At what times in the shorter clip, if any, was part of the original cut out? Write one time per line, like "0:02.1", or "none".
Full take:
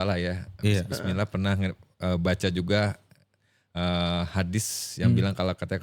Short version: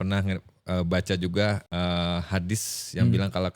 0:01.6